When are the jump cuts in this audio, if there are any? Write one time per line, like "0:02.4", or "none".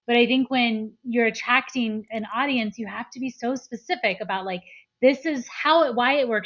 0:01.0